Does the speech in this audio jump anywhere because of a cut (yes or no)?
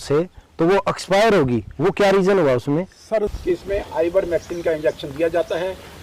yes